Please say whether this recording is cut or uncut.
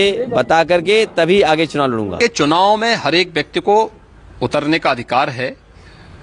uncut